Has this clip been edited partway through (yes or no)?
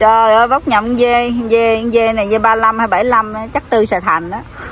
no